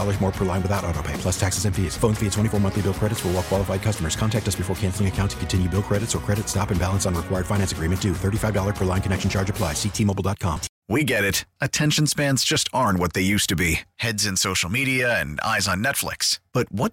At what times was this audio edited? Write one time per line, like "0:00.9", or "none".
0:10.7